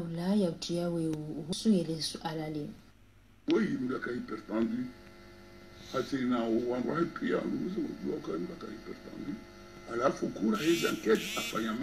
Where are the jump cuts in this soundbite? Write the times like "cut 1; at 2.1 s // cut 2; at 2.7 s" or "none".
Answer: cut 1; at 1.5 s